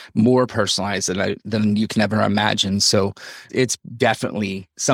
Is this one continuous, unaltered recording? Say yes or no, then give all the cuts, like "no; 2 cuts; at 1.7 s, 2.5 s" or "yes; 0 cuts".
yes; 0 cuts